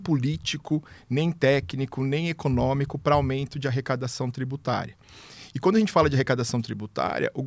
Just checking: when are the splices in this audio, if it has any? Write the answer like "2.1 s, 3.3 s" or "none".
none